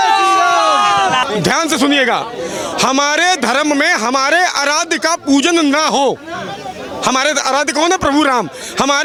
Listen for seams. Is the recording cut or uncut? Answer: uncut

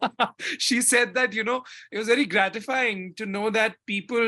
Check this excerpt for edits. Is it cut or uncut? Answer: uncut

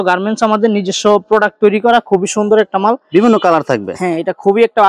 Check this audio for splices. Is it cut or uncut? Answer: uncut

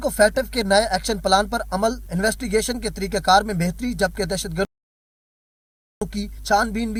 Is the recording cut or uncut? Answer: uncut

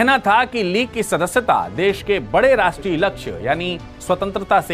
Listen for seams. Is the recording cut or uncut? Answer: uncut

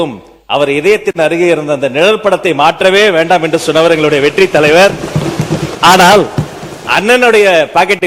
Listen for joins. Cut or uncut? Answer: cut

